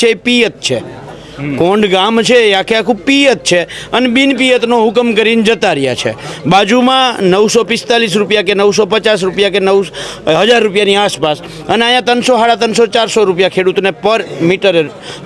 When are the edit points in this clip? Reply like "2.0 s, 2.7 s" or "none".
none